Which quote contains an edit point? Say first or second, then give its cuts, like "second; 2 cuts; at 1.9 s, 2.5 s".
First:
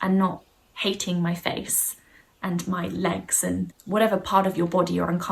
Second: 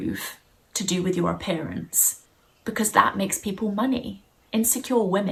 first; 1 cut; at 3.8 s